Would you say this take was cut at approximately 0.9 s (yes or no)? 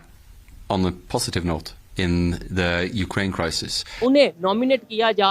no